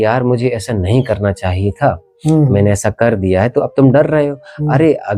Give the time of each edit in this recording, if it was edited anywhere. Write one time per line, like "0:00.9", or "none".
none